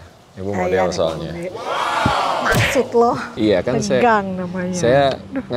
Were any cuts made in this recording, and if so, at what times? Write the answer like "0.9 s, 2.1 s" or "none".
3.3 s